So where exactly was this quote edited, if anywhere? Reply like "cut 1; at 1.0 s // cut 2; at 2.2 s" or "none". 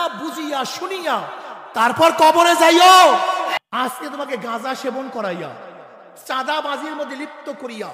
cut 1; at 3.5 s